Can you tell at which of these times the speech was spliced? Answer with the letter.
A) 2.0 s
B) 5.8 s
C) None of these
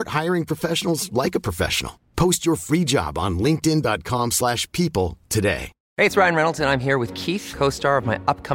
B